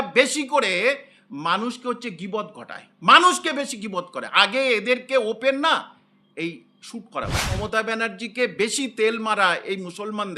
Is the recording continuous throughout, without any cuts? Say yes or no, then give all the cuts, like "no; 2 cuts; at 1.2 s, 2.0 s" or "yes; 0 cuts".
no; 1 cut; at 7.6 s